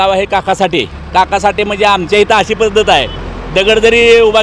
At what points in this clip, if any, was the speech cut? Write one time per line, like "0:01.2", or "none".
0:01.0